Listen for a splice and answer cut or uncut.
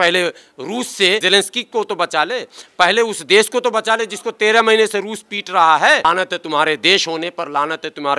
cut